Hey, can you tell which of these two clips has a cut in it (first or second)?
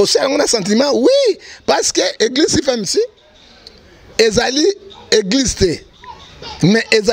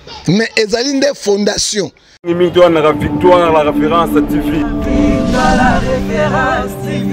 second